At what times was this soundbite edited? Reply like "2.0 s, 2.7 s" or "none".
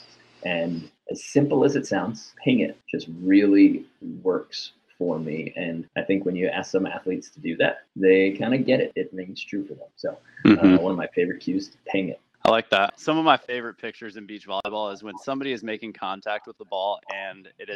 12.9 s